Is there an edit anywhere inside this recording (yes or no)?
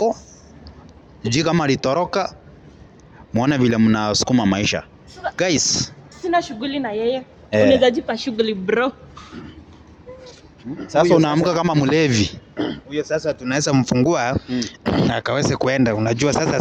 no